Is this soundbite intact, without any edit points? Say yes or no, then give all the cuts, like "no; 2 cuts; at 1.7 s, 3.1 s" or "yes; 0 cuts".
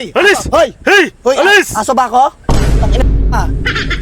yes; 0 cuts